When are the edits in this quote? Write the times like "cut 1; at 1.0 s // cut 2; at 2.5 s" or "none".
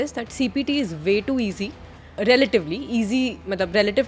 cut 1; at 2.2 s